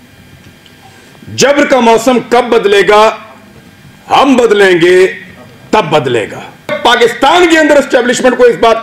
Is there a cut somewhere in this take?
yes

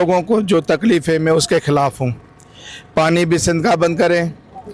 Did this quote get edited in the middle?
no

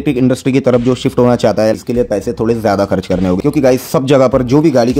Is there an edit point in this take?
no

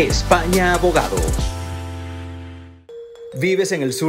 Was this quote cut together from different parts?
yes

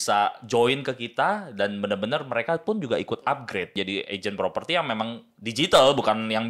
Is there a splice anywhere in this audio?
yes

